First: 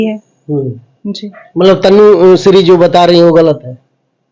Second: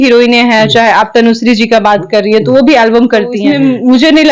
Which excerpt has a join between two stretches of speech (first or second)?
second